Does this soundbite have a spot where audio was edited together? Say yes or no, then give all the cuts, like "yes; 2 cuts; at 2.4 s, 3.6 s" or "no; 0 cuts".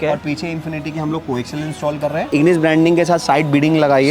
yes; 1 cut; at 2.3 s